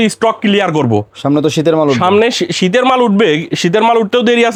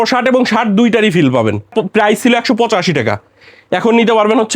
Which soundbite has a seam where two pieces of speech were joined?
second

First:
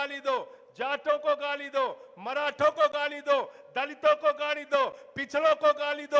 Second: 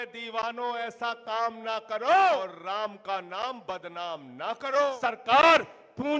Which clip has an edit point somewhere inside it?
second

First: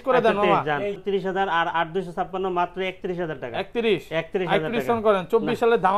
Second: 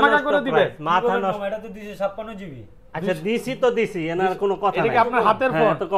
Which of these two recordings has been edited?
first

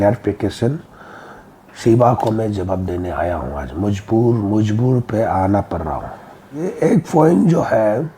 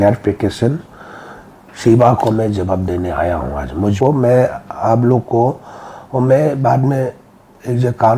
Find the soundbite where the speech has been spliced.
second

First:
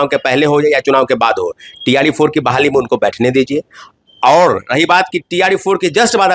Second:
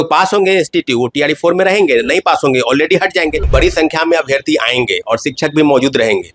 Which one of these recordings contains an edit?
second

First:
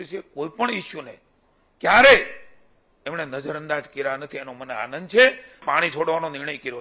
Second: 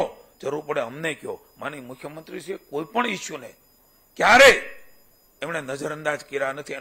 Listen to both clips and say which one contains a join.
first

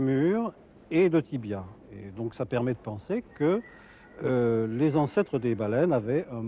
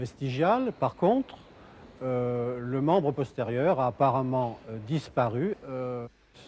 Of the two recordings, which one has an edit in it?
second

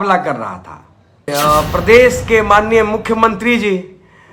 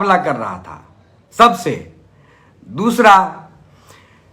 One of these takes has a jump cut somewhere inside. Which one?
first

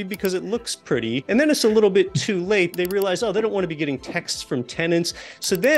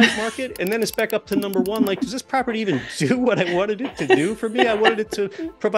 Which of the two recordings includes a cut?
first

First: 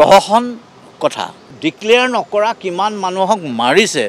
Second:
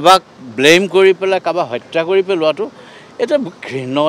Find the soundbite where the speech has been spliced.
first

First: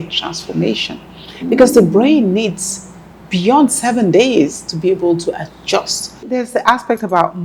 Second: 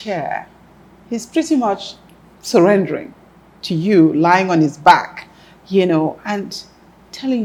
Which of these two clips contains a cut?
first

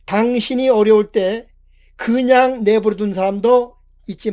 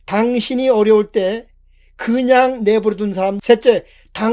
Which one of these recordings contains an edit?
second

